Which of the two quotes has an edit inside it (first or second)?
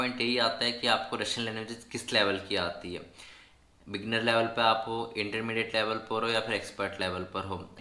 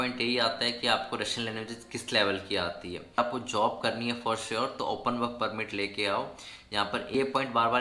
second